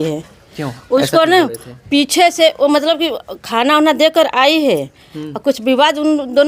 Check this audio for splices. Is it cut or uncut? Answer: uncut